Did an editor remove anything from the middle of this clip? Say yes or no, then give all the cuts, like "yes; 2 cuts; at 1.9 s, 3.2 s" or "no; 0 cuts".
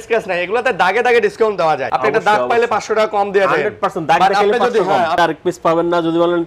yes; 2 cuts; at 1.9 s, 5.2 s